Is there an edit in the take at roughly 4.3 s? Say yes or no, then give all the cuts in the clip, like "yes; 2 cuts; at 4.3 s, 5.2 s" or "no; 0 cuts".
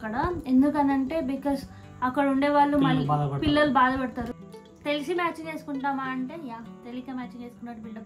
yes; 1 cut; at 4.3 s